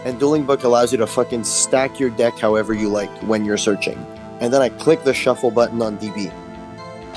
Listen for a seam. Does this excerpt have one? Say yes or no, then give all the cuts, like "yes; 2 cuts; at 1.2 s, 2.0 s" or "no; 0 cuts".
no; 0 cuts